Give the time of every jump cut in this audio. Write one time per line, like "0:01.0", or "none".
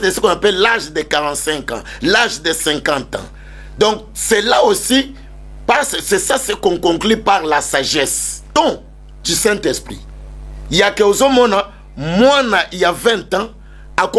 0:08.3